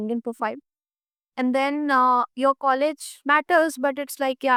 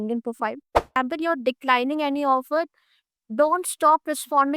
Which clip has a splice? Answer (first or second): second